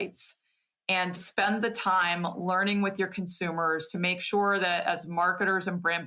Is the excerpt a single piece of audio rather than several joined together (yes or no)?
no